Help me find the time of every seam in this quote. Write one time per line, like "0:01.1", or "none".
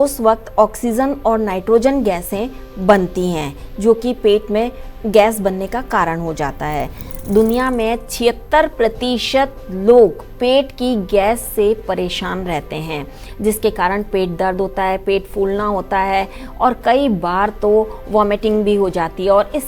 0:07.1